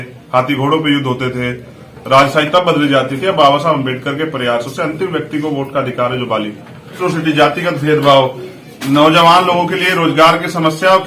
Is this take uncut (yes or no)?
no